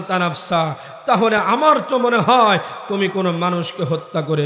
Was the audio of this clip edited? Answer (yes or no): no